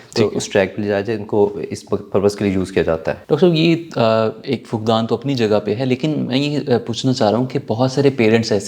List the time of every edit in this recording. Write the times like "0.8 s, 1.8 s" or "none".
none